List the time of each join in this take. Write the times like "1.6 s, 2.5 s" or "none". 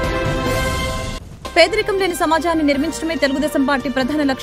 1.3 s